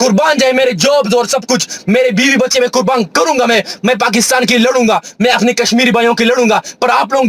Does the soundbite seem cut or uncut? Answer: uncut